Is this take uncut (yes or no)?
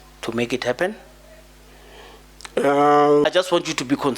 no